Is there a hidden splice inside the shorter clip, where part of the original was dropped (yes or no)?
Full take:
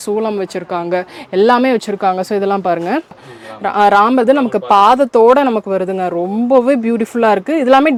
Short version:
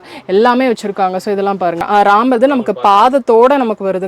yes